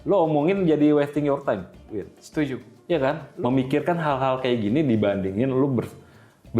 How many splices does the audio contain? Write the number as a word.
one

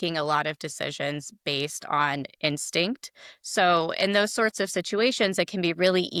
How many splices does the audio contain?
zero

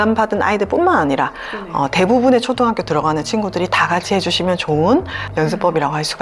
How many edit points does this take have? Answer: one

